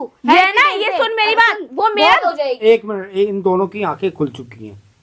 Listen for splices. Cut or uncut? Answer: cut